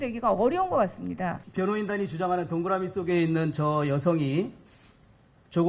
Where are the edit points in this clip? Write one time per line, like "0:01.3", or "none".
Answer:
0:01.4